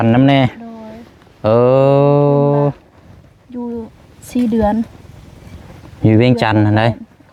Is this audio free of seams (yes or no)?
yes